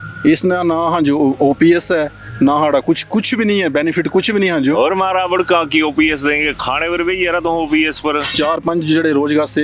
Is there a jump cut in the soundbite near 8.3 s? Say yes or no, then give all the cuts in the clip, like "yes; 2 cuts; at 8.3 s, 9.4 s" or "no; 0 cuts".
yes; 1 cut; at 8.3 s